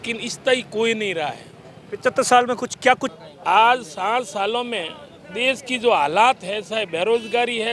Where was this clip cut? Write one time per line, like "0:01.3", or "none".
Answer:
0:03.1